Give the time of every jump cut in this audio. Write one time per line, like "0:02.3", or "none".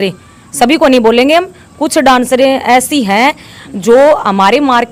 none